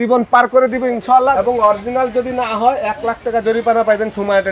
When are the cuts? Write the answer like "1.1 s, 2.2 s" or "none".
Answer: 1.4 s